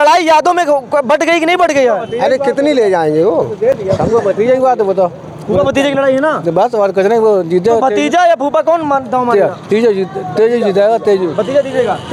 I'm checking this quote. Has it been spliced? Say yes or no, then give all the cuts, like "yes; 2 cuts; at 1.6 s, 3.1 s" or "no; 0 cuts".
no; 0 cuts